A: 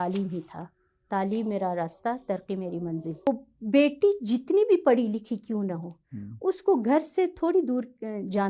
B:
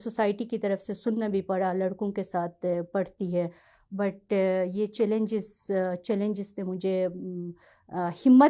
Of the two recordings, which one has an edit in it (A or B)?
A